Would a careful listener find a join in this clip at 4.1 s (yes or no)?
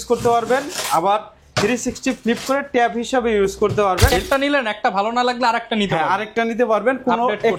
yes